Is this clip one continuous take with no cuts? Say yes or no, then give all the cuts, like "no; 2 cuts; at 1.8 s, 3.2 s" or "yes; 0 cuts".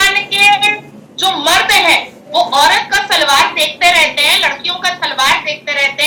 yes; 0 cuts